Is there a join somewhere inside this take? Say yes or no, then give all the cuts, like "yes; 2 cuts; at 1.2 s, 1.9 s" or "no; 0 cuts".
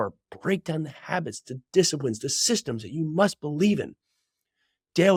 no; 0 cuts